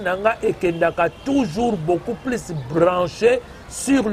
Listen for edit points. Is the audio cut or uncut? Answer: uncut